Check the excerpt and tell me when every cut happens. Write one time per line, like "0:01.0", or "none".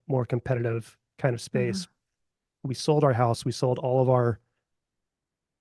0:02.5